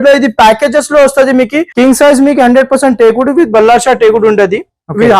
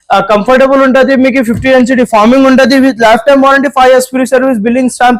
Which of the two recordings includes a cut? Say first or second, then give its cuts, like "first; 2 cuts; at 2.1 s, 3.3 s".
first; 1 cut; at 1.6 s